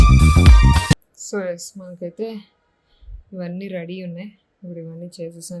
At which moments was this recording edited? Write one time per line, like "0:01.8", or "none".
0:00.9